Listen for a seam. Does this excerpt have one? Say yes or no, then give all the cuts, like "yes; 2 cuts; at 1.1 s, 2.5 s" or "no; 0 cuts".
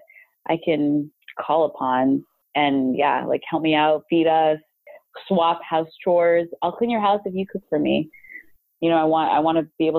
yes; 2 cuts; at 2.4 s, 4.8 s